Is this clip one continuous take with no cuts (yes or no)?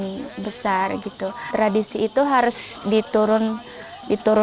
no